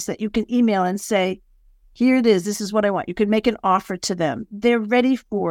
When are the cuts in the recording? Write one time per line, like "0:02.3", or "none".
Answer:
0:04.5